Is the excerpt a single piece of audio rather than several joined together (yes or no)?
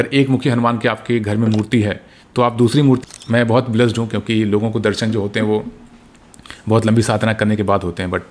no